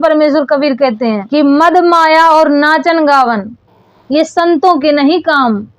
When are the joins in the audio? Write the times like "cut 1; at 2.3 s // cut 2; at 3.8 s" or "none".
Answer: cut 1; at 1.2 s